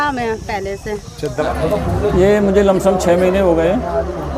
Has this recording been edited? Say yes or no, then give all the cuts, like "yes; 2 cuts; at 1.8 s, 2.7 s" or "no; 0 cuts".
yes; 1 cut; at 1.4 s